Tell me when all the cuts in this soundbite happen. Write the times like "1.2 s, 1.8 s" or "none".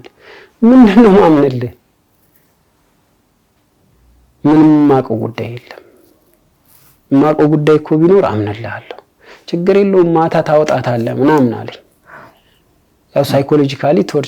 none

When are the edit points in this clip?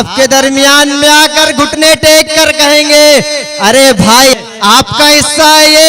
4.3 s

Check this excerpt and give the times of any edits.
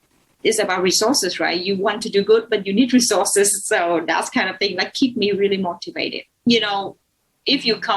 6.5 s

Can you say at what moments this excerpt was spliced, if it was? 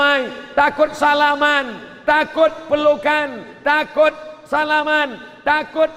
none

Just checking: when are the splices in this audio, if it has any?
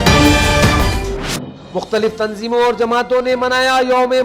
1.0 s

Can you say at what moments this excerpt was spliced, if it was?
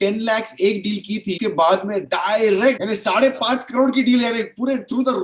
1.4 s, 2.8 s

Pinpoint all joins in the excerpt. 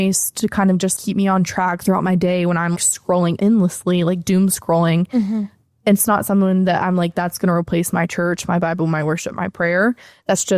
0.9 s, 3.1 s

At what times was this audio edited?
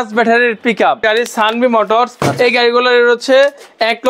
1.0 s

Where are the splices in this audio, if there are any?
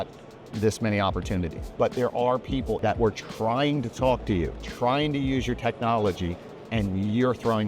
1.6 s, 2.8 s, 4.6 s

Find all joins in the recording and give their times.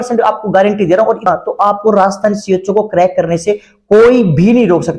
1.2 s

